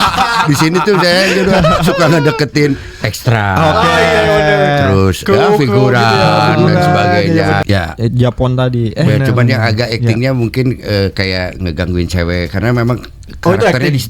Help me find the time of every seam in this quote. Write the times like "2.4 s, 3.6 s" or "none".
7.6 s

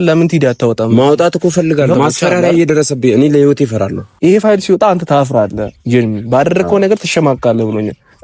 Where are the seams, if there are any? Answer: 1.9 s, 4.0 s

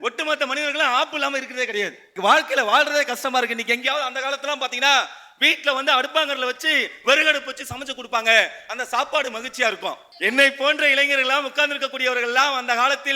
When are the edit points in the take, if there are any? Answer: 2.1 s, 10.1 s

